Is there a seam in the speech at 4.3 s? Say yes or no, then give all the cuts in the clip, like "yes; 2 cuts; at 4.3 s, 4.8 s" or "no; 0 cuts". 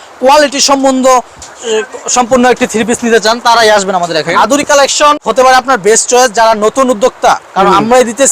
yes; 2 cuts; at 4.3 s, 5.2 s